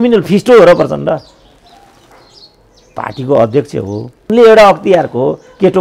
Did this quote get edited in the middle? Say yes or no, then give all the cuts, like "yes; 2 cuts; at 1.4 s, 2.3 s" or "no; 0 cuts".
yes; 1 cut; at 4.3 s